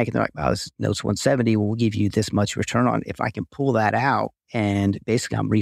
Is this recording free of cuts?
no; 1 cut; at 4.4 s

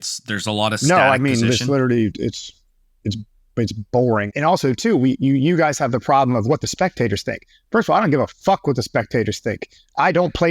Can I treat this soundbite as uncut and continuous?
no; 1 cut; at 4.3 s

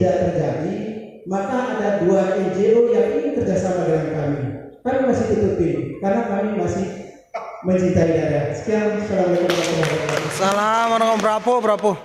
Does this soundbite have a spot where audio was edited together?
no; 0 cuts

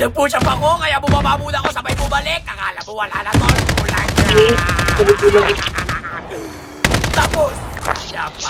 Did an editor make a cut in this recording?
no; 0 cuts

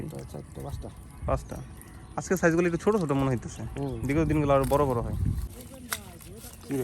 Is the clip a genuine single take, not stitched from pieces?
no; 1 cut; at 5.4 s

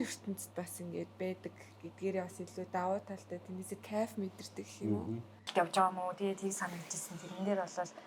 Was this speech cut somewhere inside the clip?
yes; 1 cut; at 5.5 s

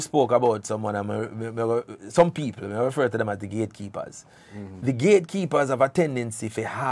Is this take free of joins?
yes; 0 cuts

